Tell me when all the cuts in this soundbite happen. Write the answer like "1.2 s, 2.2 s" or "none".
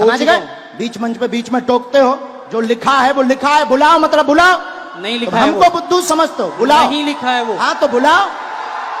none